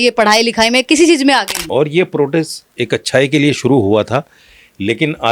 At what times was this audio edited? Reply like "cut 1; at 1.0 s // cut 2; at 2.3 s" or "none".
cut 1; at 1.6 s

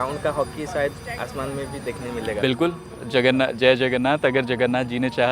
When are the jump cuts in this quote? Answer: cut 1; at 2.4 s

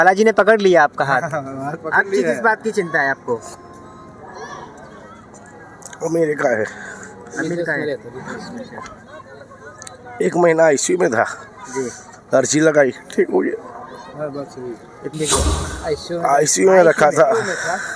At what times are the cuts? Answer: cut 1; at 15.5 s

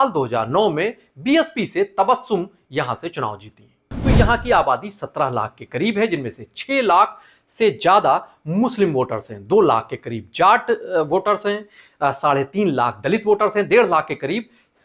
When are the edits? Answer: cut 1; at 3.9 s

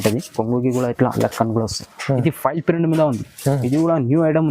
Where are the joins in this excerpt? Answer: cut 1; at 1.9 s

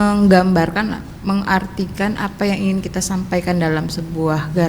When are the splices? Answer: none

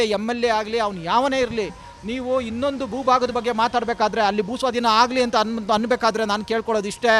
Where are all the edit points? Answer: none

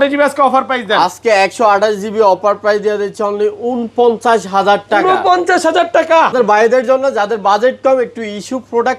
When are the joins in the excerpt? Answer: cut 1; at 6.3 s

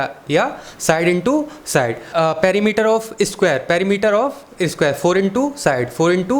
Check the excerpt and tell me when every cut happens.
cut 1; at 2.0 s

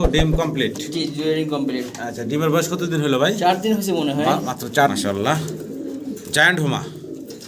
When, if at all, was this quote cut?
cut 1; at 4.9 s

